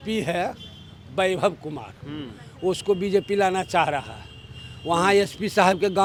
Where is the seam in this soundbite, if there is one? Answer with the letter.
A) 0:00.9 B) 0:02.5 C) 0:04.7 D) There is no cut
D